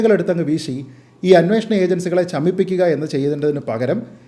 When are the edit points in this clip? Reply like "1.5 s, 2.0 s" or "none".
none